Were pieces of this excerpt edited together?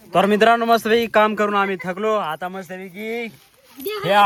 no; 0 cuts

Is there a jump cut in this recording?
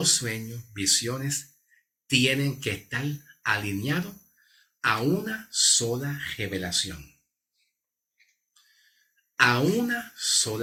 no; 0 cuts

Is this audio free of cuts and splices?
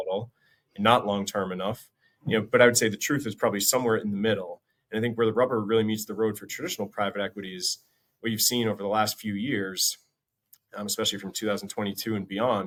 yes; 0 cuts

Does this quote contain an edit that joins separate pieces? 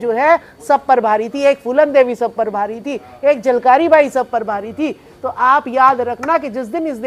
no; 0 cuts

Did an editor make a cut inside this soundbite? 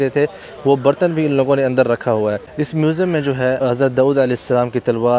yes; 2 cuts; at 2.5 s, 3.6 s

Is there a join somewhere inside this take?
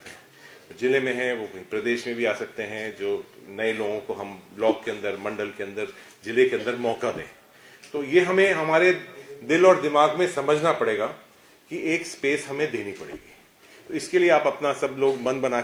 no; 0 cuts

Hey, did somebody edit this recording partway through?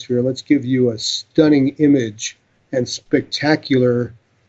yes; 1 cut; at 1.1 s

